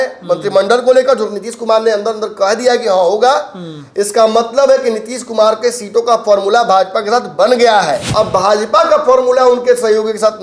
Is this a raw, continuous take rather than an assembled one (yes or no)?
no